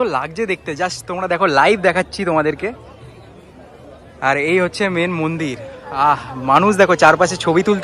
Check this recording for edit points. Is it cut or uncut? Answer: uncut